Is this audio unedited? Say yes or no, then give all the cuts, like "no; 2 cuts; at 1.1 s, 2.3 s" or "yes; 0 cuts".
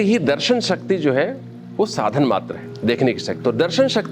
no; 1 cut; at 3.0 s